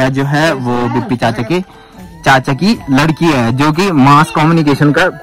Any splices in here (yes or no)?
no